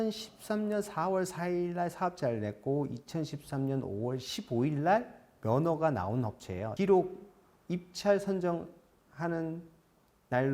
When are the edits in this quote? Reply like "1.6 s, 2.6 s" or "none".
6.7 s

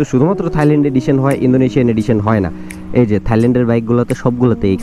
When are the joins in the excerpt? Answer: none

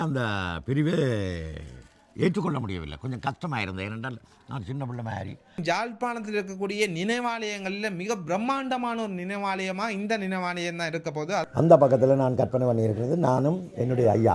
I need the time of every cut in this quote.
5.6 s, 11.4 s

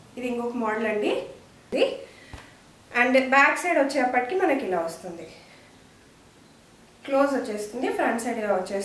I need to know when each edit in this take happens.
1.6 s

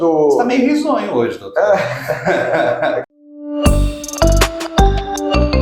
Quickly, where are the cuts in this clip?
3.0 s

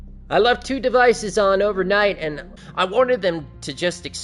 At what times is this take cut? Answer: 2.4 s

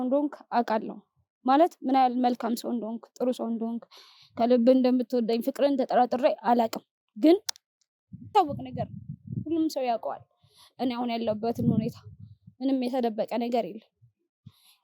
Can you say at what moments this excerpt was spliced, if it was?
8.3 s

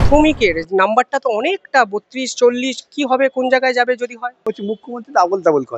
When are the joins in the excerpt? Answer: 4.4 s

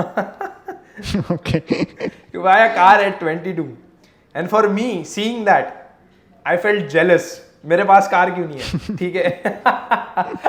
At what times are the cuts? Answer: none

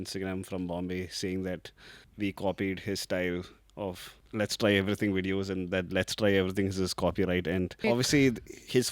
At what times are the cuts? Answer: 2.1 s, 4.1 s, 7.9 s

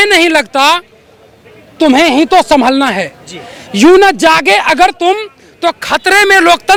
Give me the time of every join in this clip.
none

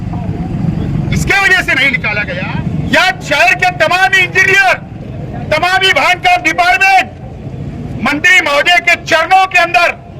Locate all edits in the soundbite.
2.2 s

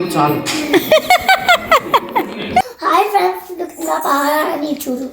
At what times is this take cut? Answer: 2.7 s

